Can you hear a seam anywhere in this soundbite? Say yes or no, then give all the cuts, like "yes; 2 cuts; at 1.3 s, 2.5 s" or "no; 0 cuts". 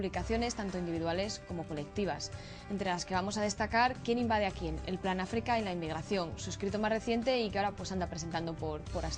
no; 0 cuts